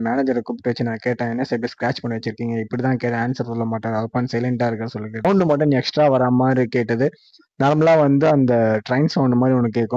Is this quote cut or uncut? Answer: cut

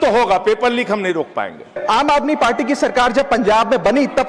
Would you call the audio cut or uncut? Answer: cut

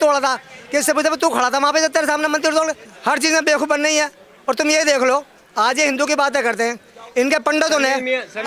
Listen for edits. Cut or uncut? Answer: cut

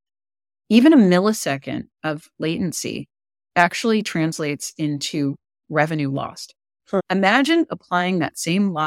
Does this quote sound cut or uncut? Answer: cut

